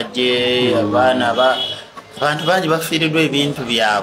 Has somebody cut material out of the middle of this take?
yes; 1 cut; at 2.5 s

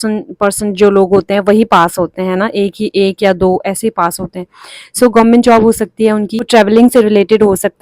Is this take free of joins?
no; 1 cut; at 6.5 s

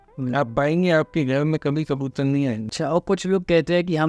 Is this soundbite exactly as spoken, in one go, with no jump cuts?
no; 1 cut; at 2.7 s

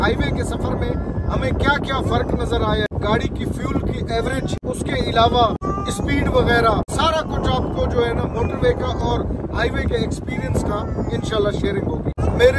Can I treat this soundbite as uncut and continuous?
yes; 0 cuts

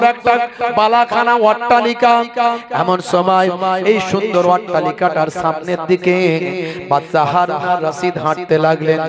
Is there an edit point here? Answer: no; 0 cuts

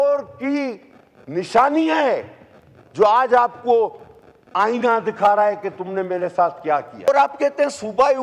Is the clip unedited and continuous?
no; 1 cut; at 7.1 s

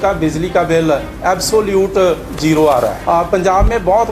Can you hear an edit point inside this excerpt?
yes; 1 cut; at 3.0 s

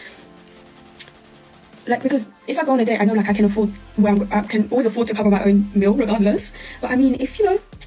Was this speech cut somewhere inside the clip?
yes; 1 cut; at 7.0 s

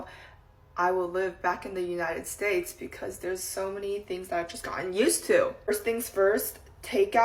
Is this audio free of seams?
yes; 0 cuts

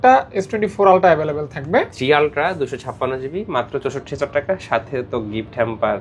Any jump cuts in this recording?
yes; 1 cut; at 1.9 s

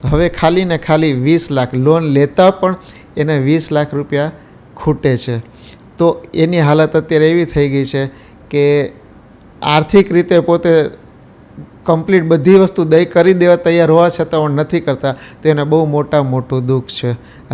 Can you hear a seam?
no; 0 cuts

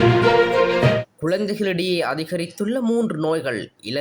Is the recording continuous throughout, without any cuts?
no; 1 cut; at 1.0 s

